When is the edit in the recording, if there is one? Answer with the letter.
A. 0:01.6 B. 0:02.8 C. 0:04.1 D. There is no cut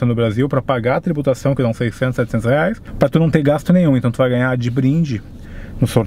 B